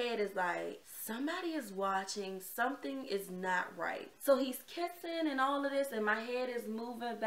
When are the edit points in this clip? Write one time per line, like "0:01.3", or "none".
0:00.9
0:04.1